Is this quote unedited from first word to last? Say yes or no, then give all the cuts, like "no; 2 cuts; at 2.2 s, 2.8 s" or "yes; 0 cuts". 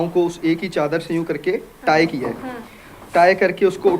yes; 0 cuts